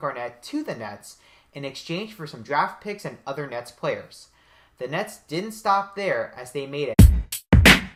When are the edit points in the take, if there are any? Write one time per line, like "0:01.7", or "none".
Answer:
none